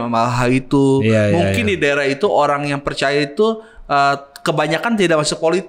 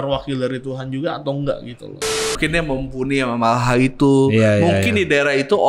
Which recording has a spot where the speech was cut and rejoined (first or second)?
second